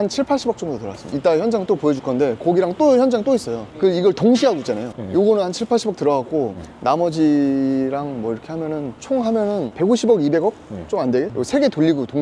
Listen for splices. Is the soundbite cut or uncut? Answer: cut